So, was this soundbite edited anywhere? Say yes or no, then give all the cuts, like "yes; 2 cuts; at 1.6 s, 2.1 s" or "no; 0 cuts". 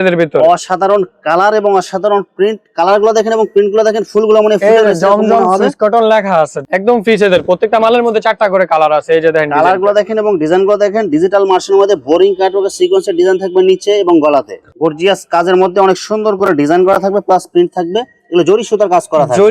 yes; 2 cuts; at 6.6 s, 14.7 s